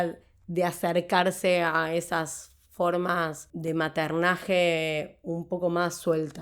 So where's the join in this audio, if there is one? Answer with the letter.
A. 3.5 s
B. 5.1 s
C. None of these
A